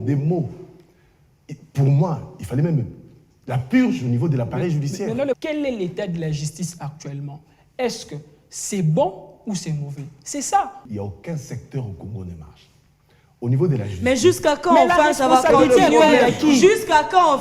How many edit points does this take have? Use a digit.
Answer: 2